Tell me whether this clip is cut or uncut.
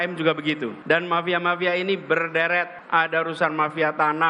cut